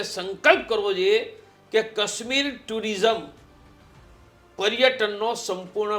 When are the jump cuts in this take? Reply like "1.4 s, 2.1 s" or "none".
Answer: none